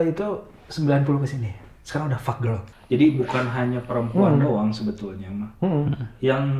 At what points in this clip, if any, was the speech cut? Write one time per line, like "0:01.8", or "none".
0:02.7